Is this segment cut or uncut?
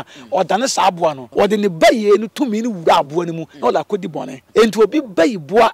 cut